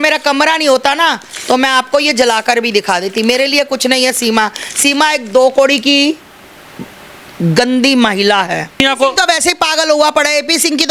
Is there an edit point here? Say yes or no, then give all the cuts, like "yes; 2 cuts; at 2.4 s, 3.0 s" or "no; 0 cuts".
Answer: yes; 1 cut; at 8.8 s